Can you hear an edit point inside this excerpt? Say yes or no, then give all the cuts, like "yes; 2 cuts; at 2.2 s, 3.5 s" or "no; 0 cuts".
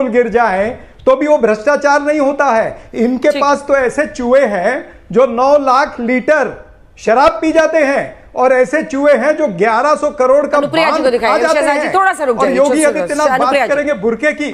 no; 0 cuts